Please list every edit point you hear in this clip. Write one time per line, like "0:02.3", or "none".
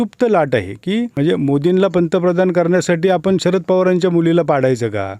0:01.1